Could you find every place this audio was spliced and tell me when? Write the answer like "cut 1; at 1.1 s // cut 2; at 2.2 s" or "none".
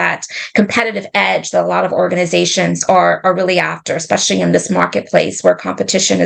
none